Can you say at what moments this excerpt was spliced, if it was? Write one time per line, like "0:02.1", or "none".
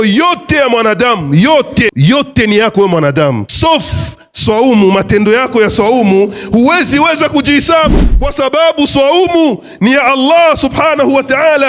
0:01.9
0:03.5
0:07.9